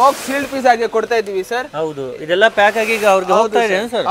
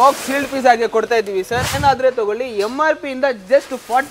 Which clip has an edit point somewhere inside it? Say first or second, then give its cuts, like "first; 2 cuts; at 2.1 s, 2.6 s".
second; 1 cut; at 1.8 s